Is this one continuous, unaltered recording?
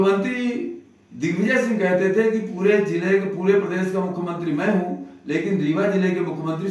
yes; 0 cuts

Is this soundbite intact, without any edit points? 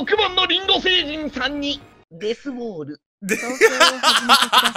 yes; 0 cuts

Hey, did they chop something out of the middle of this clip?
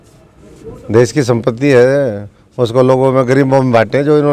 no; 0 cuts

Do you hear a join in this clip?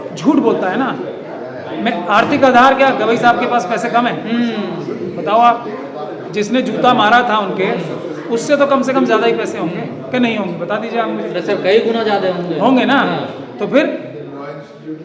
no; 0 cuts

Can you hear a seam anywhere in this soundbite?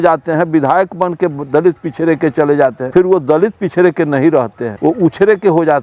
yes; 2 cuts; at 2.8 s, 4.6 s

